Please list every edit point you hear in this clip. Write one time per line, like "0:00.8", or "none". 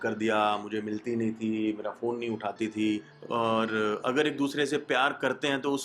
0:03.1